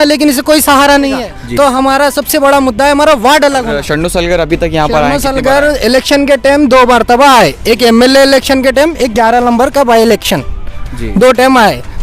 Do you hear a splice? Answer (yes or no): yes